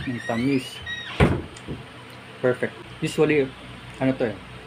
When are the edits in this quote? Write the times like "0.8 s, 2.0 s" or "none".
2.8 s